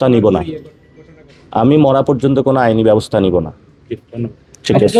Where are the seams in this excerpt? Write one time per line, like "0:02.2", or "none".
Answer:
none